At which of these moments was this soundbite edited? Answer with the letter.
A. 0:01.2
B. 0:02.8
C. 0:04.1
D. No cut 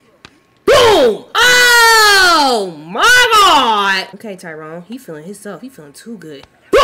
C